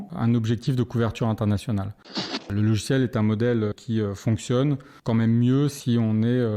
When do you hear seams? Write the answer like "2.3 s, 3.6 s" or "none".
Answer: 2.4 s, 3.8 s, 4.9 s